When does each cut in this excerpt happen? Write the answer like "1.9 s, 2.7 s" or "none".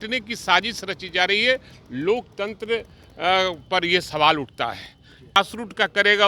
5.4 s